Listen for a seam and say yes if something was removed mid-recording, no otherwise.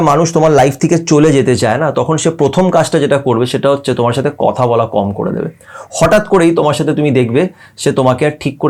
no